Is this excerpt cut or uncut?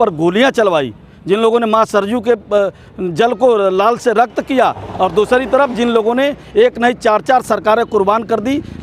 uncut